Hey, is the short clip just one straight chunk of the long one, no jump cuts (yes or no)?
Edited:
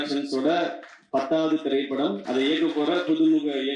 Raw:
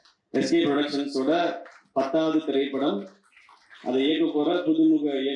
no